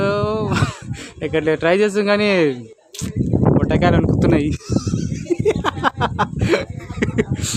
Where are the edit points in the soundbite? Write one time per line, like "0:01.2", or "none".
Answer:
none